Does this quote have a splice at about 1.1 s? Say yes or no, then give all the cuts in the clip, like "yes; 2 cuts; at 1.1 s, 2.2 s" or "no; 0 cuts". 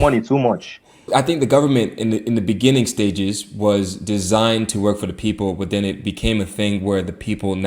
yes; 1 cut; at 1.1 s